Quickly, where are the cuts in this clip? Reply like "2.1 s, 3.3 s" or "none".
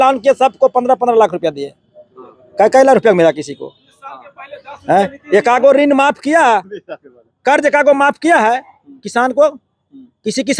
none